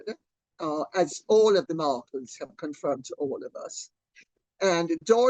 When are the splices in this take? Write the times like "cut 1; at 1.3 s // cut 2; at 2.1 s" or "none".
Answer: none